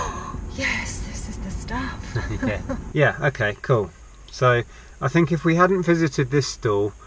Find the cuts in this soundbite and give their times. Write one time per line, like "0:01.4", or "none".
0:02.8